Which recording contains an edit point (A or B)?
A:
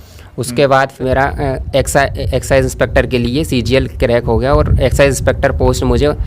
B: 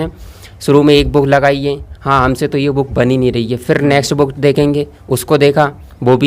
A